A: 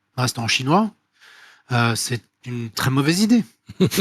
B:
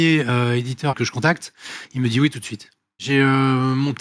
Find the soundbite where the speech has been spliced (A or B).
B